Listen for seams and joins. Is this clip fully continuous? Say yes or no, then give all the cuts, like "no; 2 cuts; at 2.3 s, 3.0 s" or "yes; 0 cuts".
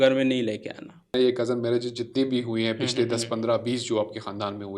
no; 1 cut; at 1.1 s